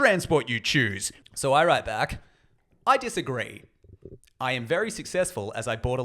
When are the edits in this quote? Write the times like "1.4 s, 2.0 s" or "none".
1.0 s